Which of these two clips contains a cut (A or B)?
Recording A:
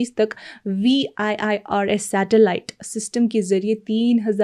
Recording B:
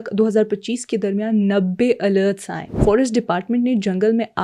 B